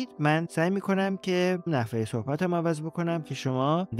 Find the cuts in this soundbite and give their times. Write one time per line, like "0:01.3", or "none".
none